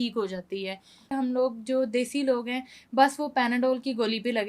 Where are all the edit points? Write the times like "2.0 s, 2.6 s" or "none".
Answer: 1.1 s